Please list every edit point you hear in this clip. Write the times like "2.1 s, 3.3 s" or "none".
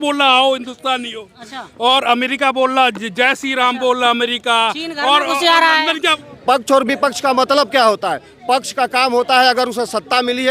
6.2 s

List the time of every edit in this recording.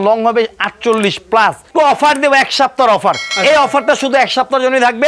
1.7 s

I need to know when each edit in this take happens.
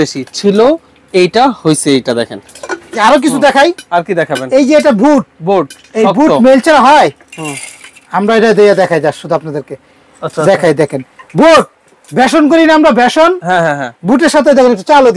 none

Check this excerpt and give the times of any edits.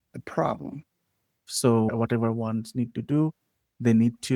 1.4 s

